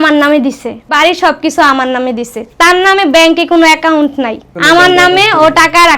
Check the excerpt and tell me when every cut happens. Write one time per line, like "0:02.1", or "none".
0:00.9